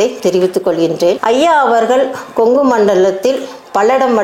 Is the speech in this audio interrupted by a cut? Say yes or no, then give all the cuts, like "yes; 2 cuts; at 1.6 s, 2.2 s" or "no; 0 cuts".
no; 0 cuts